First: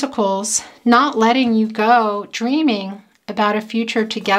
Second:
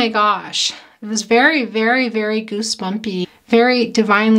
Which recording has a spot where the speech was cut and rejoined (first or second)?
second